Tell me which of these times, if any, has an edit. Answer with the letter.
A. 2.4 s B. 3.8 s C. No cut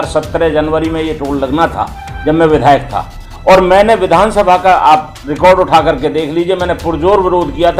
C